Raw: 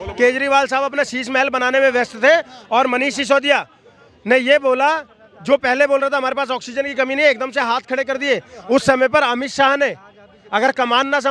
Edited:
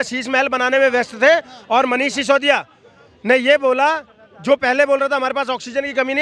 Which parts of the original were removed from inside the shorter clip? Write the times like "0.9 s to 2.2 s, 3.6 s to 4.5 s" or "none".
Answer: none